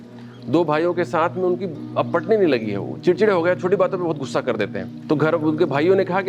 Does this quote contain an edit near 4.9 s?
yes; 1 cut; at 4.9 s

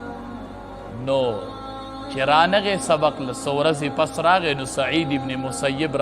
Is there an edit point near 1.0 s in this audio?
yes; 1 cut; at 1.0 s

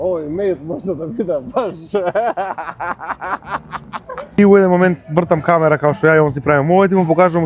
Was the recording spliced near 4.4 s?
yes; 1 cut; at 4.4 s

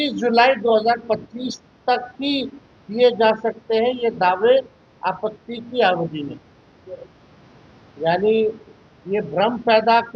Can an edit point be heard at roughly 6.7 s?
no; 0 cuts

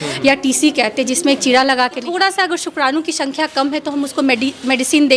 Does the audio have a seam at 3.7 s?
no; 1 cut; at 2.0 s

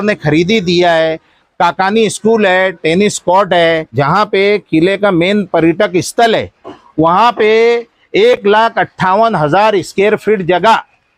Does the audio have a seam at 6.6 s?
no; 1 cut; at 3.9 s

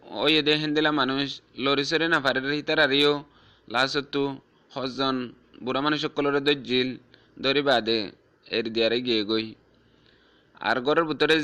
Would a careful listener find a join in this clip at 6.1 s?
yes; 1 cut; at 6.1 s

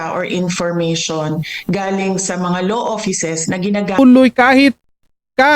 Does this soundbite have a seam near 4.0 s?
yes; 1 cut; at 4.0 s

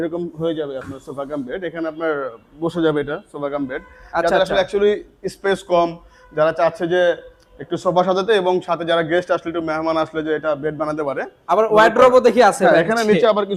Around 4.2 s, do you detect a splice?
no; 0 cuts

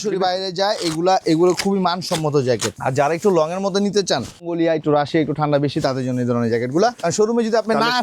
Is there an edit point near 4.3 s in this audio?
no; 2 cuts; at 2.7 s, 7.1 s

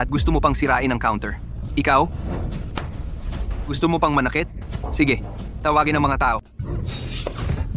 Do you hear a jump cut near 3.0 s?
no; 1 cut; at 6.5 s

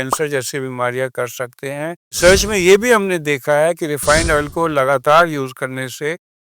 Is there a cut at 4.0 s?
no; 1 cut; at 2.2 s

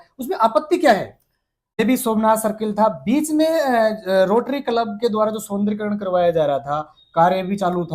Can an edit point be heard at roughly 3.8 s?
no; 1 cut; at 1.8 s

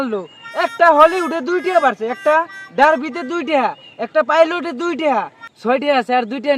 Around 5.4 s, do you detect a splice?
yes; 1 cut; at 5.4 s

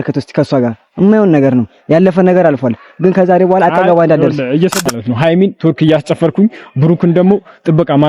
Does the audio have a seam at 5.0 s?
yes; 1 cut; at 5.0 s

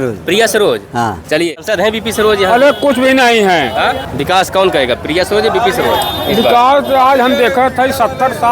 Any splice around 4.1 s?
yes; 2 cuts; at 1.6 s, 4.1 s

